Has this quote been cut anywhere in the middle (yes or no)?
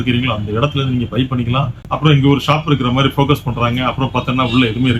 yes